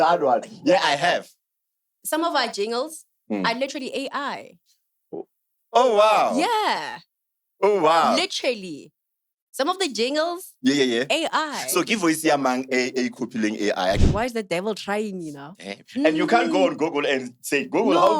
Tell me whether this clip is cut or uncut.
cut